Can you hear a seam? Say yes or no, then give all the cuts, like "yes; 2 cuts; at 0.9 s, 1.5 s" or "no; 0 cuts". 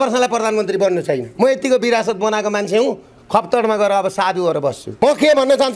yes; 2 cuts; at 1.3 s, 4.9 s